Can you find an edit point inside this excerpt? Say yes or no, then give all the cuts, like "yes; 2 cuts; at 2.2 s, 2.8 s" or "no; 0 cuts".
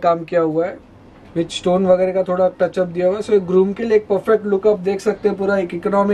no; 0 cuts